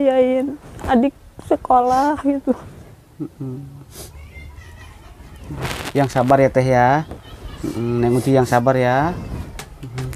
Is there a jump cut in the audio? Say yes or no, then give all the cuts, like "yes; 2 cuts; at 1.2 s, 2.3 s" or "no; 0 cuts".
yes; 1 cut; at 2.7 s